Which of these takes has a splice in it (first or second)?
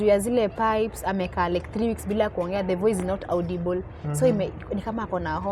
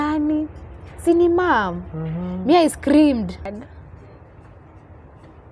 second